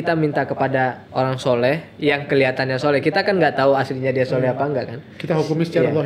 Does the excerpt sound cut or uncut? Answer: cut